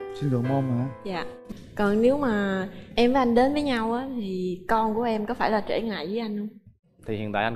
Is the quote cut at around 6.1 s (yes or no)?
no